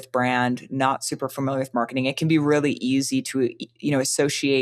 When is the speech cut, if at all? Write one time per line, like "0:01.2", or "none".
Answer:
none